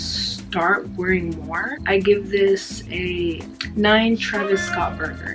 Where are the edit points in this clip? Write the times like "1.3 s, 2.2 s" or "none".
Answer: 1.8 s, 3.5 s